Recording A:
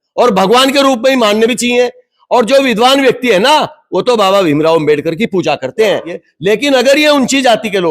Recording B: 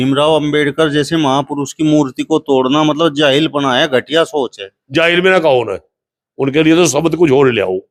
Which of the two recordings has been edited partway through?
A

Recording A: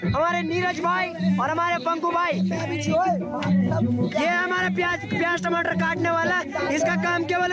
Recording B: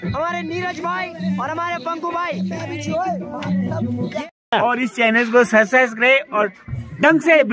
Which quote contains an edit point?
B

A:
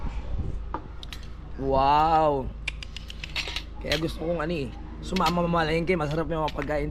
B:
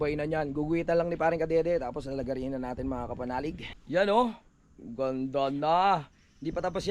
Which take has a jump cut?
B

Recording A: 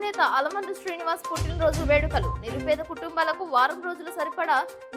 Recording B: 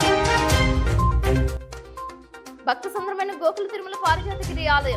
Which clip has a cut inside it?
B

